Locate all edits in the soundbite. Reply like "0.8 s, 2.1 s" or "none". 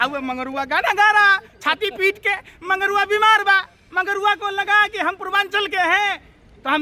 none